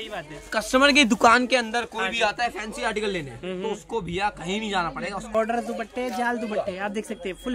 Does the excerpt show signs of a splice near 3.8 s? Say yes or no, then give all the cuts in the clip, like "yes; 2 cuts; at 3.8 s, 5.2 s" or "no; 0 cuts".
no; 1 cut; at 5.3 s